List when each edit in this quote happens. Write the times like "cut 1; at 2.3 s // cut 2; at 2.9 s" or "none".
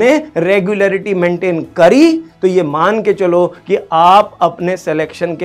none